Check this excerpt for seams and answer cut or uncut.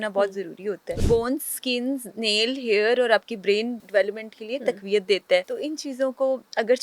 cut